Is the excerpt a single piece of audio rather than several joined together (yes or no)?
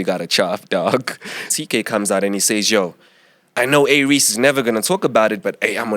no